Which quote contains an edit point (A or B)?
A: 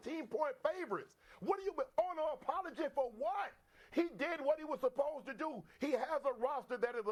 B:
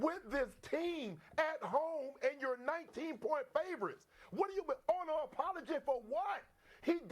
B